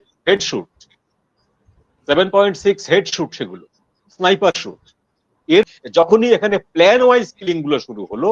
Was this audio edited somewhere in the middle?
yes; 1 cut; at 5.7 s

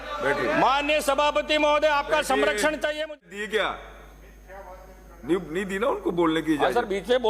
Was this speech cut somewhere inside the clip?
yes; 1 cut; at 3.1 s

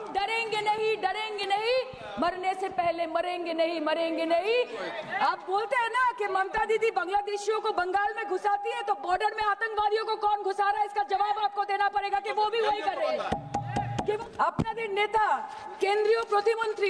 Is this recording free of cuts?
no; 2 cuts; at 4.8 s, 14.2 s

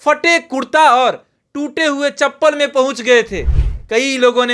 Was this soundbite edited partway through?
no; 0 cuts

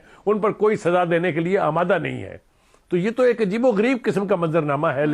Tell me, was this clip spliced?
no; 0 cuts

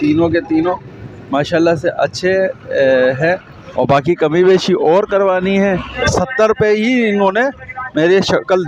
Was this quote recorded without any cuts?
no; 1 cut; at 6.0 s

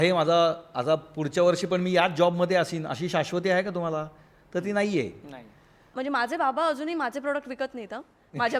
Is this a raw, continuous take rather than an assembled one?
no; 1 cut; at 5.9 s

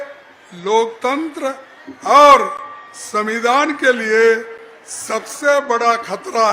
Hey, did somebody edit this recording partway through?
no; 0 cuts

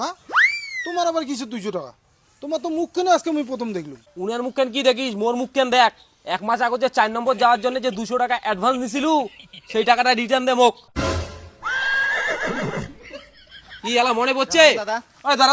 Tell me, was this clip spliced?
no; 0 cuts

